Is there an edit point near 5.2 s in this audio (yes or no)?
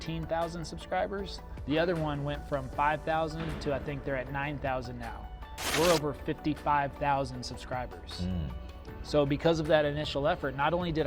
no